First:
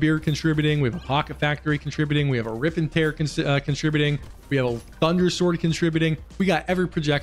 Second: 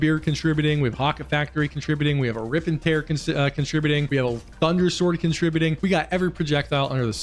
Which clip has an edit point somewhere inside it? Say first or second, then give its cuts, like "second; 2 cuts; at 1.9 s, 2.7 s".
second; 3 cuts; at 0.9 s, 4.1 s, 5.8 s